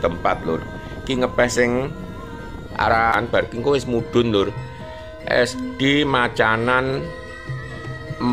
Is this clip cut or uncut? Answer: cut